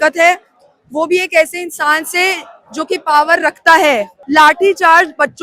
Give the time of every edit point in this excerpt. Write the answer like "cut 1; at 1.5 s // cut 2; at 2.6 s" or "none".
cut 1; at 4.1 s

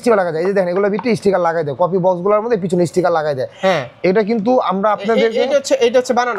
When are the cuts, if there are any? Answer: none

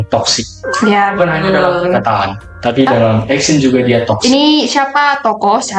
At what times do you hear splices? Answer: cut 1; at 4.2 s

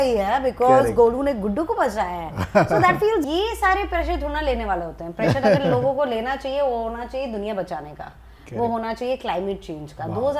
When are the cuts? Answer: cut 1; at 3.3 s

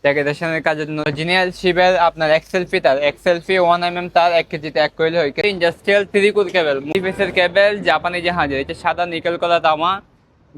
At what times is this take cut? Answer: cut 1; at 1.1 s // cut 2; at 5.4 s // cut 3; at 6.9 s

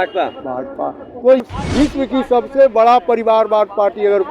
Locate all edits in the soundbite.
cut 1; at 1.5 s

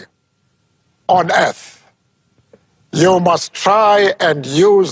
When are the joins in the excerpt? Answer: none

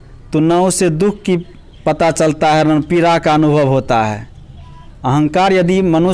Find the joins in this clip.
none

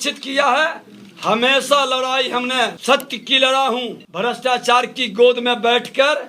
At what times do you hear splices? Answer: cut 1; at 2.8 s // cut 2; at 4.0 s

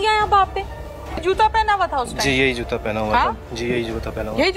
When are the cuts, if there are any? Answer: cut 1; at 1.2 s

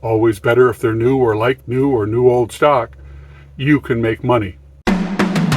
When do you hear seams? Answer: cut 1; at 4.7 s

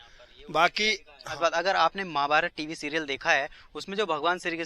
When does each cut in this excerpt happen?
cut 1; at 1.7 s

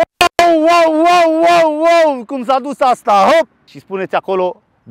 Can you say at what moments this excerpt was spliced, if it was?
cut 1; at 3.8 s

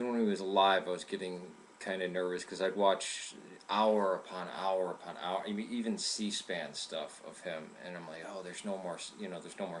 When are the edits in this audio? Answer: none

